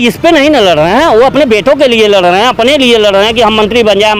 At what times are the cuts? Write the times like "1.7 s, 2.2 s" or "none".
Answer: none